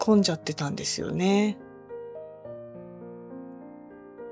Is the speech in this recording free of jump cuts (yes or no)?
no